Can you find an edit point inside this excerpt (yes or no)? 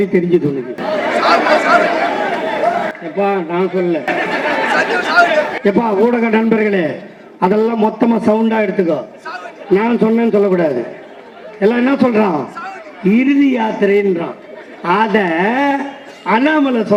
no